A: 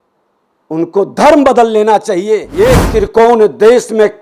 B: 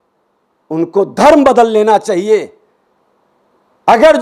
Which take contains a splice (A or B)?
A